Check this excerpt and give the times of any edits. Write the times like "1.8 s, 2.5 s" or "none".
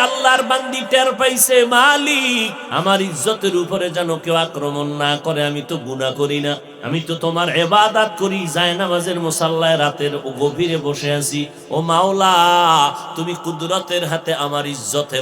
2.6 s, 6.7 s